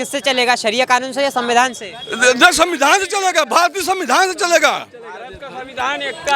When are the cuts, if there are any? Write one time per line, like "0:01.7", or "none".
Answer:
none